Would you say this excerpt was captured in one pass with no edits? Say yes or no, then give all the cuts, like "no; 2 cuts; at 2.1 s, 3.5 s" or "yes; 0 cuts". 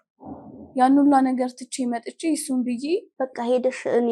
no; 1 cut; at 3.1 s